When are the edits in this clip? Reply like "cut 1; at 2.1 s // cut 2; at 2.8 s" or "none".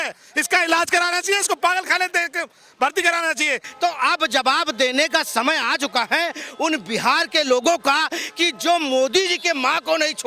cut 1; at 3.7 s